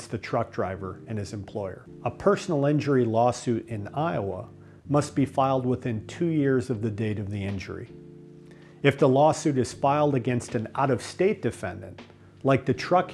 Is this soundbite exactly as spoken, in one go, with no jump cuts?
no; 1 cut; at 1.9 s

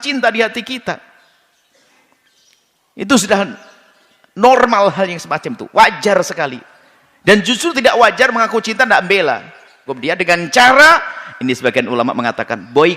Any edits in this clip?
yes; 1 cut; at 9.9 s

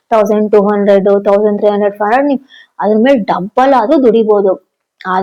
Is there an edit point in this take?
no; 0 cuts

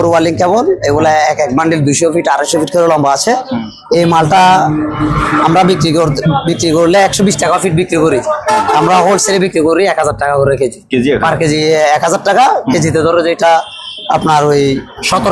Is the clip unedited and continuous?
yes; 0 cuts

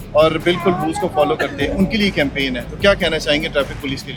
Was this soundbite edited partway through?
no; 0 cuts

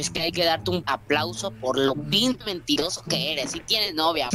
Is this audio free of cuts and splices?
no; 2 cuts; at 0.9 s, 2.1 s

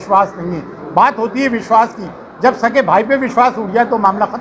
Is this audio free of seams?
yes; 0 cuts

